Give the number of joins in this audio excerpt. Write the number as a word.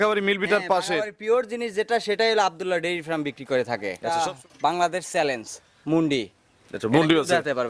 one